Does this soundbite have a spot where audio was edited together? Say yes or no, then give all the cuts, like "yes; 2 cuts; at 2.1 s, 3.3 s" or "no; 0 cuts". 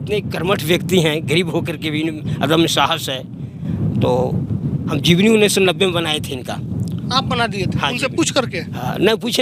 no; 0 cuts